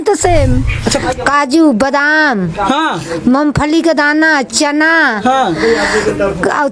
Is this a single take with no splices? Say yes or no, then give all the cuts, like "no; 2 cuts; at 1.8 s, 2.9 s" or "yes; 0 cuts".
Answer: no; 1 cut; at 1.0 s